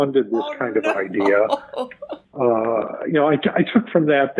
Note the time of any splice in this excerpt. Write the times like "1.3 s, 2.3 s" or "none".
2.2 s